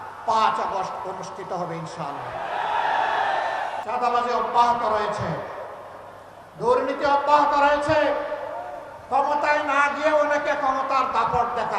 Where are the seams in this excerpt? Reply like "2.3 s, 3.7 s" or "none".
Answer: 3.8 s